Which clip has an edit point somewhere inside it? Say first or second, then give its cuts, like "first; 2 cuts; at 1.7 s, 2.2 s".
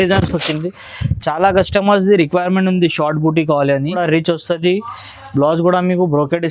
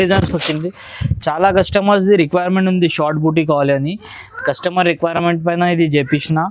first; 1 cut; at 4.0 s